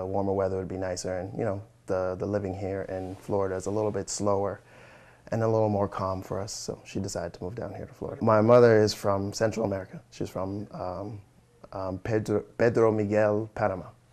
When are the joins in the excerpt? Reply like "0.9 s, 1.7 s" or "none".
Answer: 8.2 s